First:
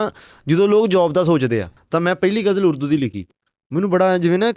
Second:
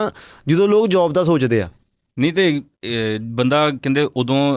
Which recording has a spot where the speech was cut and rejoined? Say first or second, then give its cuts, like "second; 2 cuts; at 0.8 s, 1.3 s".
first; 1 cut; at 1.8 s